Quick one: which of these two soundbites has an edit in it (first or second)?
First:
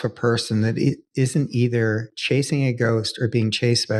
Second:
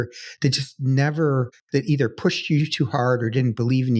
second